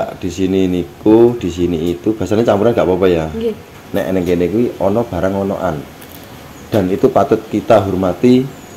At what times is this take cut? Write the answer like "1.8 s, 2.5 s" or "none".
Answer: 3.7 s